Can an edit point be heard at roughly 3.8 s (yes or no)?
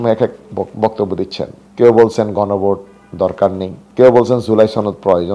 yes